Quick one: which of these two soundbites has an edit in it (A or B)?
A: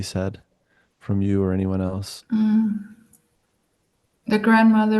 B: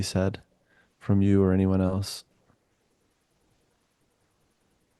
A